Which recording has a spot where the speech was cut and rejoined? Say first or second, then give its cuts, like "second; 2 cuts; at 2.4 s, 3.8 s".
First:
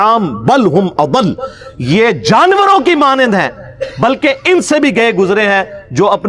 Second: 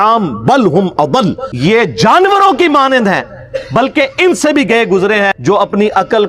second; 2 cuts; at 1.5 s, 5.4 s